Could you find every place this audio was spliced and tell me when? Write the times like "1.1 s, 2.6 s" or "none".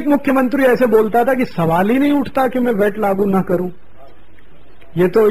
2.6 s

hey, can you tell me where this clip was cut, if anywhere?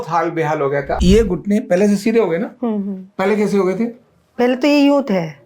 0.9 s

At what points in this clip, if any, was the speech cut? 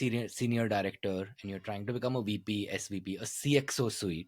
none

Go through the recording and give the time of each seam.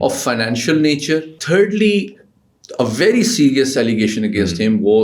1.4 s

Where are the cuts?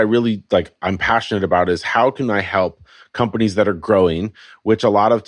none

